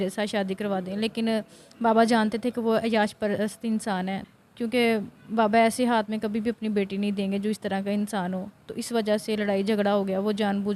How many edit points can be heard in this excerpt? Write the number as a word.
one